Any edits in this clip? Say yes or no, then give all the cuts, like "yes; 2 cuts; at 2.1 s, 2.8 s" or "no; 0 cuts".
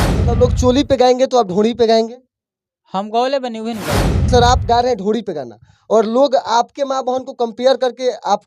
yes; 1 cut; at 4.3 s